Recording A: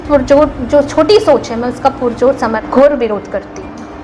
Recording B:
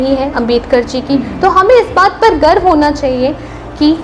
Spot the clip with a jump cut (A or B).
A